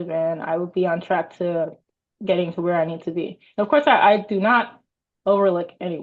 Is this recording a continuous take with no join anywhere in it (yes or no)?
yes